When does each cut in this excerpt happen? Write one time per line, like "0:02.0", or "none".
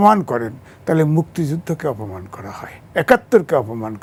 none